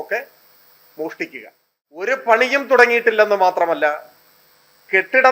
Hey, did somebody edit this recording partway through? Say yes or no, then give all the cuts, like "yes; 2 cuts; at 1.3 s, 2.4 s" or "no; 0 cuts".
yes; 1 cut; at 2.1 s